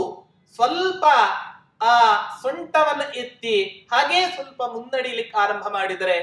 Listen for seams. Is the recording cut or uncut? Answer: uncut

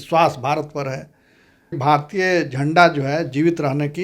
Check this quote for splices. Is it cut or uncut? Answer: cut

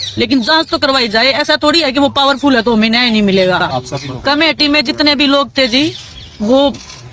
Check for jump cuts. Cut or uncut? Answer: uncut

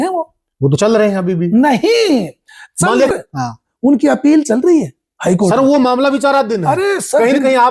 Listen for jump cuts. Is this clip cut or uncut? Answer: cut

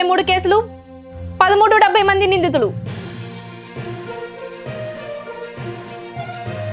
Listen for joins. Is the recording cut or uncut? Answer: uncut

